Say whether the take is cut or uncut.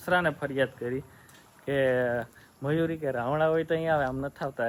uncut